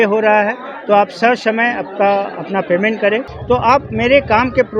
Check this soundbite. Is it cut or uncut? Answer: cut